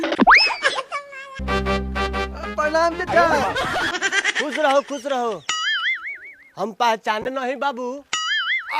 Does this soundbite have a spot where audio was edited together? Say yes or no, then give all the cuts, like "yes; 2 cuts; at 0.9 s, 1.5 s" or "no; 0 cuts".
yes; 1 cut; at 1.4 s